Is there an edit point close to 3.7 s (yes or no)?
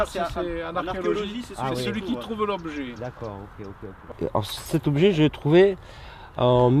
yes